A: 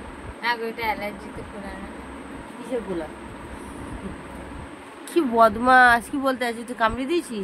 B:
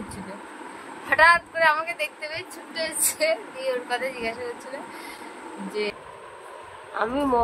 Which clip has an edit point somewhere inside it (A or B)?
B